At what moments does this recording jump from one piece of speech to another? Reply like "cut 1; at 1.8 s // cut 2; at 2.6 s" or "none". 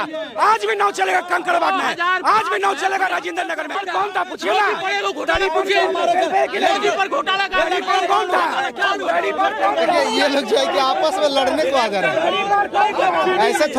cut 1; at 3.8 s